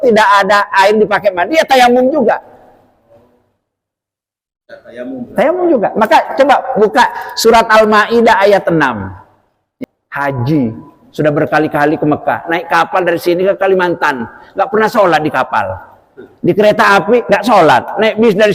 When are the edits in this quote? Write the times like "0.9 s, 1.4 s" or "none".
9.6 s